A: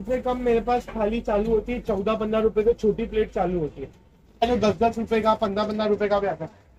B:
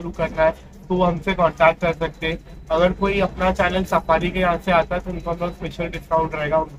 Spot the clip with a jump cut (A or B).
A